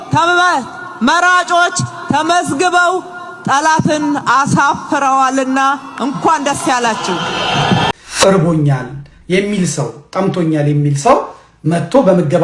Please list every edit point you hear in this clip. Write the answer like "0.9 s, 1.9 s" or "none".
7.9 s